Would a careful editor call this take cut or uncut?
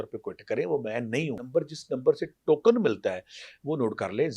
cut